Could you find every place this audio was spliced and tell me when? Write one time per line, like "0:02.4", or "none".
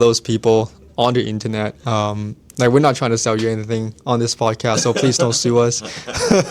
none